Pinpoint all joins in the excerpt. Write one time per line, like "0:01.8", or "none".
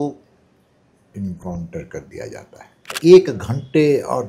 0:03.0